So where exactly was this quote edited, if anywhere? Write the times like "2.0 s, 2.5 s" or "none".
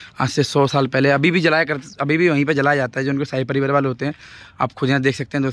none